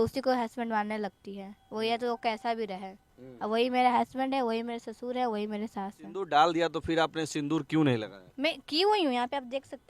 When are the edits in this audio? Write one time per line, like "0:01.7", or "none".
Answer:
0:06.0